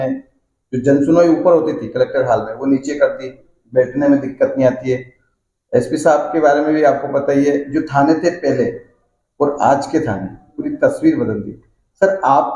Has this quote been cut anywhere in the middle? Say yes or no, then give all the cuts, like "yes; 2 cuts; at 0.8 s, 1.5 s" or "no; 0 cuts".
no; 0 cuts